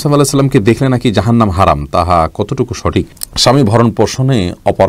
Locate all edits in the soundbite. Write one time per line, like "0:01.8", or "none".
0:03.2